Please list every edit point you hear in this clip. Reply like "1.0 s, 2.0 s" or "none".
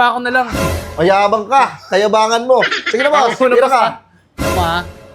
none